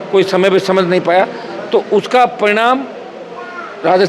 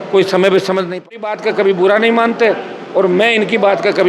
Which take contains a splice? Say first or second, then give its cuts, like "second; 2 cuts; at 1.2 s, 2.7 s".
second; 1 cut; at 1.6 s